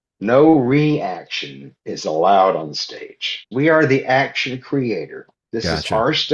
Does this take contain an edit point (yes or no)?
yes